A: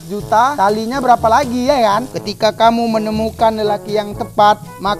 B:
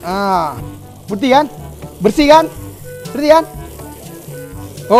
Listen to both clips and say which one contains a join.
A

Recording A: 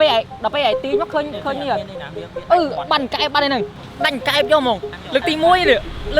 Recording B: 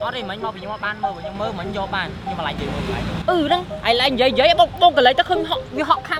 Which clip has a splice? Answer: A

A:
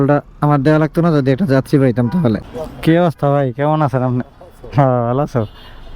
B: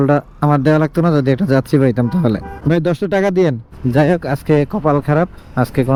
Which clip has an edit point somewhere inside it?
A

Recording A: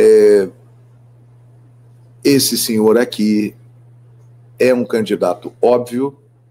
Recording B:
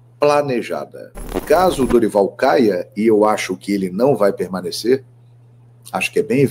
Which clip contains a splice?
B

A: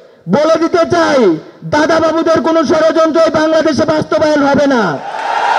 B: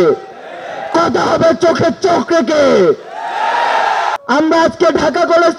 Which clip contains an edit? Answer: B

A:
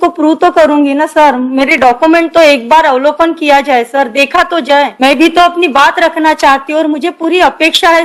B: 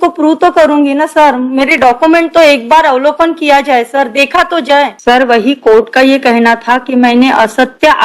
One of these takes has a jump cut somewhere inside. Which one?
B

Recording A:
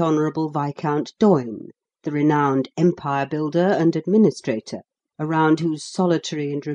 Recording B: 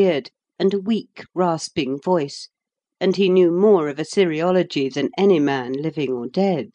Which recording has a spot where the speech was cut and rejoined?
A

